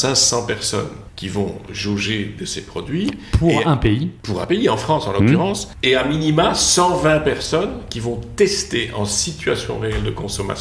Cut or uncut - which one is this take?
cut